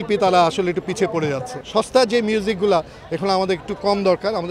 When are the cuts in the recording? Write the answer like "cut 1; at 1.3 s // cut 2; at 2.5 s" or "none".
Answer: cut 1; at 1.5 s